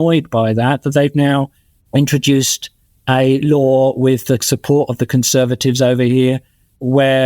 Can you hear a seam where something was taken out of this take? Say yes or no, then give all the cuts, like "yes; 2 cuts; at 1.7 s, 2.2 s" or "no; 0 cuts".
no; 0 cuts